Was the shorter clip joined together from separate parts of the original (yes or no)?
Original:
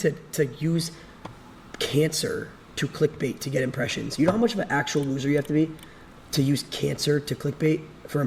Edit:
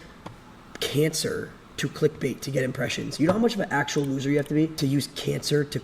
yes